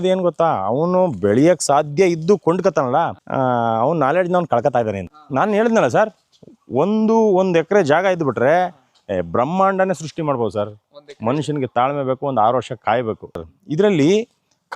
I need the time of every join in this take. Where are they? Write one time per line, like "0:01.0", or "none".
0:05.1
0:13.5